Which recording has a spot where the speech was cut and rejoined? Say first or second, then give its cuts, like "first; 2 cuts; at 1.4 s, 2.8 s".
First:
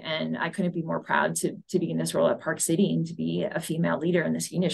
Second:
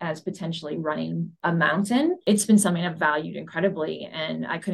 second; 2 cuts; at 1.3 s, 2.2 s